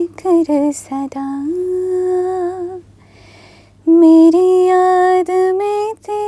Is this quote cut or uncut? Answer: uncut